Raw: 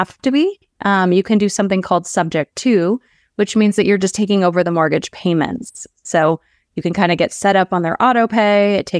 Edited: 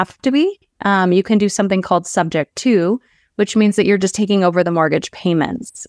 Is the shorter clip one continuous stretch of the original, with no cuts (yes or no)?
yes